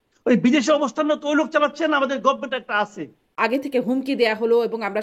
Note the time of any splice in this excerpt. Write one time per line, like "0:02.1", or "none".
0:03.3